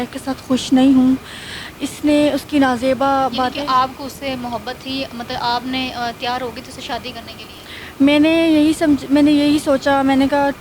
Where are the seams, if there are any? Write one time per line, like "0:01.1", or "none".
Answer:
none